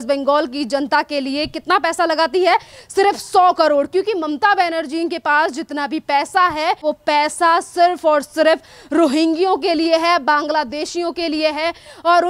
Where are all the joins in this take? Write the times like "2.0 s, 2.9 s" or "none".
6.8 s